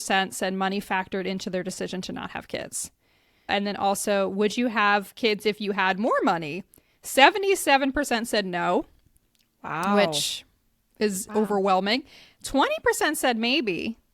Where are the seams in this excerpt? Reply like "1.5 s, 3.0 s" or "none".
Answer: 3.5 s